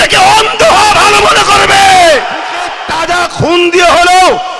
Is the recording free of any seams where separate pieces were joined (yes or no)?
no